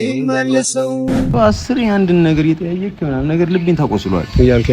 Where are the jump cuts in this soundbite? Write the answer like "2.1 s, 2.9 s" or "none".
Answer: 1.3 s

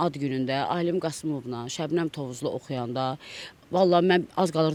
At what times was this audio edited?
none

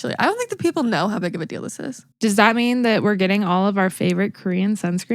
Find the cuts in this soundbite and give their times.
2.0 s

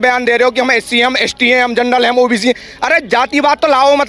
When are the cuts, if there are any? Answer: none

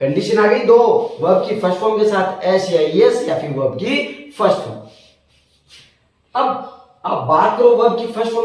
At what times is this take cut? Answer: none

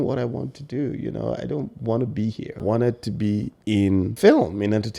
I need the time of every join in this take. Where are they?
2.6 s, 3.7 s

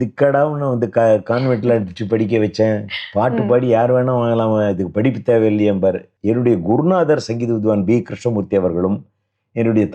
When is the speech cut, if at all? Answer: 6.1 s

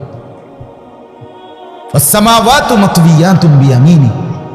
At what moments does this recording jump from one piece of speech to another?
none

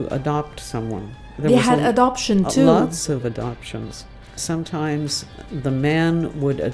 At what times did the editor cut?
4.4 s

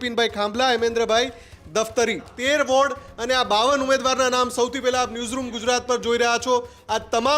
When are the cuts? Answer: 2.3 s

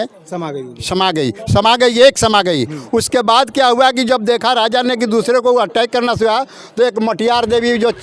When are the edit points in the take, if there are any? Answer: none

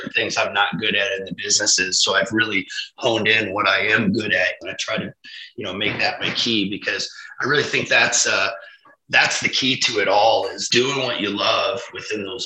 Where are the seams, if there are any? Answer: 4.5 s, 10.6 s

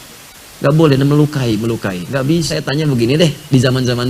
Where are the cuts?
2.5 s

